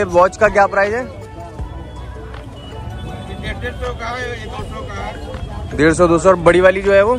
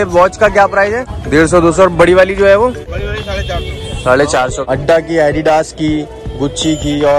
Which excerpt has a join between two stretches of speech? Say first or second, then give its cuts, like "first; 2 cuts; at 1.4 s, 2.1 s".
second; 3 cuts; at 1.1 s, 2.9 s, 4.6 s